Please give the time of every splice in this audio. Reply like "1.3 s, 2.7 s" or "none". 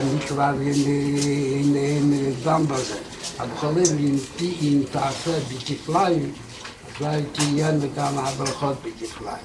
none